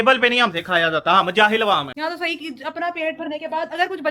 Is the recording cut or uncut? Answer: cut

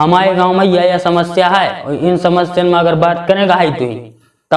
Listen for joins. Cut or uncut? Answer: uncut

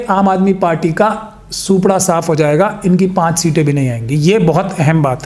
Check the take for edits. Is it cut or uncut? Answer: uncut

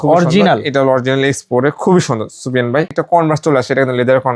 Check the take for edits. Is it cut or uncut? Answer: cut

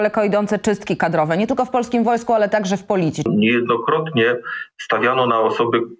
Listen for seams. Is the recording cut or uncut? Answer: cut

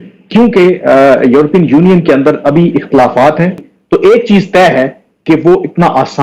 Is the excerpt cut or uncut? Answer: cut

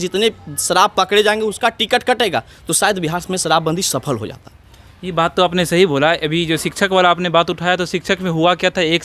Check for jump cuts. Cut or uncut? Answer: uncut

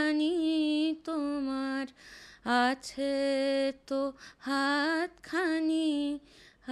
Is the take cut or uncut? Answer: uncut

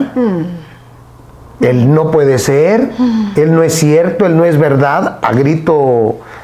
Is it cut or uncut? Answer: uncut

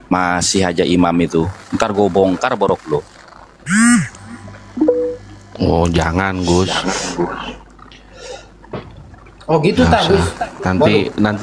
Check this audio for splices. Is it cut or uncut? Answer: uncut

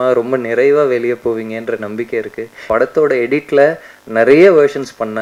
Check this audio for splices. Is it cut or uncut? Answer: cut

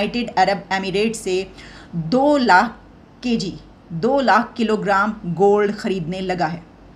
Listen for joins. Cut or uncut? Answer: uncut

